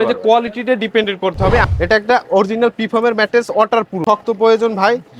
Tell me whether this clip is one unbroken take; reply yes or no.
no